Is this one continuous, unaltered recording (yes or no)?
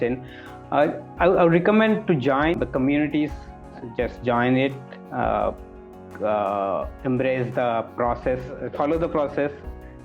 no